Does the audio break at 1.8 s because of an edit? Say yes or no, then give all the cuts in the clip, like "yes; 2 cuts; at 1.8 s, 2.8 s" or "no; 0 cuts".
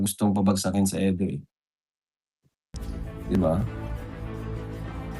no; 1 cut; at 3.7 s